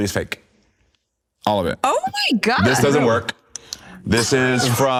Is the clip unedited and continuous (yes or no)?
yes